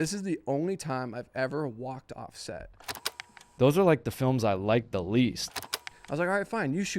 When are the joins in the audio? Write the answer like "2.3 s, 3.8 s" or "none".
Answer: 3.2 s, 5.7 s